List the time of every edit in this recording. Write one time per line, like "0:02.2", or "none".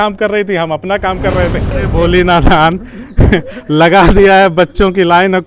0:01.8